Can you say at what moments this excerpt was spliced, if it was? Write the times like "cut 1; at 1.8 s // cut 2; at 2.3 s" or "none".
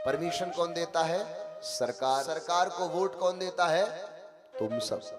cut 1; at 2.3 s